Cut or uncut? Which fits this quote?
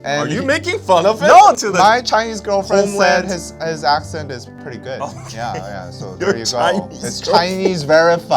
cut